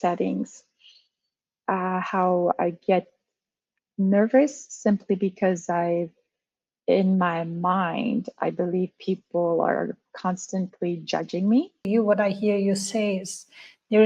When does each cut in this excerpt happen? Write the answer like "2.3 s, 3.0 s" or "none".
11.8 s